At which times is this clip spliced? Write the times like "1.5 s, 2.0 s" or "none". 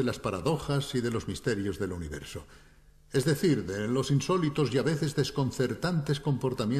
none